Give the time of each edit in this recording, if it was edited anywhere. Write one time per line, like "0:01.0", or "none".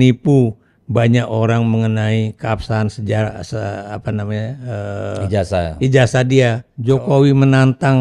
0:06.7